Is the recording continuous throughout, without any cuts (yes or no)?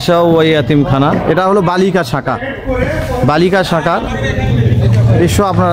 yes